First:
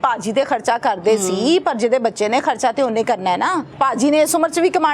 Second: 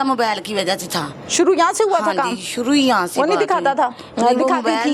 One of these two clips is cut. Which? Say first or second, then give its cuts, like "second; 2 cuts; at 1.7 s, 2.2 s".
first; 1 cut; at 3.7 s